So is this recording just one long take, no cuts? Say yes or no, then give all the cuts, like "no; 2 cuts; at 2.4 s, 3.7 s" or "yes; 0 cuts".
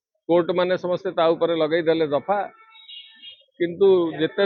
yes; 0 cuts